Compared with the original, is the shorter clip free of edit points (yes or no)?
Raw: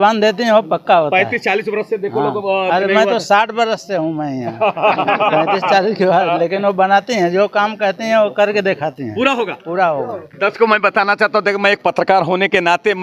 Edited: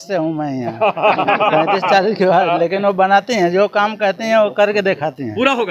yes